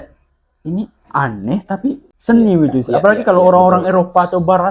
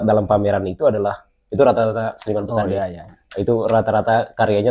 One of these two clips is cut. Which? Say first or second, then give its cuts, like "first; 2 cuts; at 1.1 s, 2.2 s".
first; 1 cut; at 2.1 s